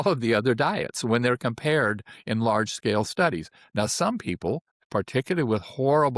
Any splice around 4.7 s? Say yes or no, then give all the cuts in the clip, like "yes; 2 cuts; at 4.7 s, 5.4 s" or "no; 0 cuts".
yes; 1 cut; at 4.7 s